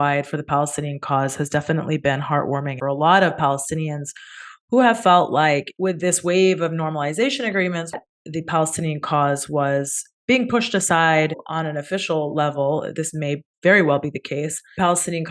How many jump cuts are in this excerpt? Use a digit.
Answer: 3